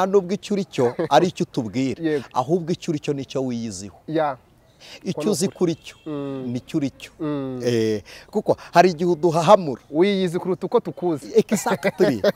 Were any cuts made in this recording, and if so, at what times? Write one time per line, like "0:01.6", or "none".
none